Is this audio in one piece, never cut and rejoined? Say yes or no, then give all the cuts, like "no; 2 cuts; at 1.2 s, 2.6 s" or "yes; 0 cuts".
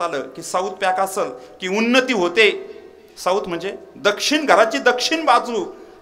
yes; 0 cuts